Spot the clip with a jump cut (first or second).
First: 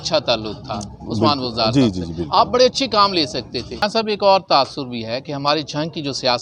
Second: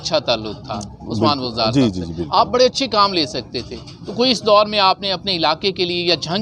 first